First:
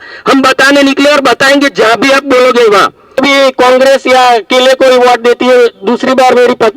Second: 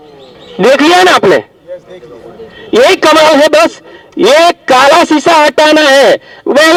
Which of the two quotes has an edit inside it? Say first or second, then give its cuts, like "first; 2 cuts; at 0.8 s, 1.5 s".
first; 1 cut; at 3.2 s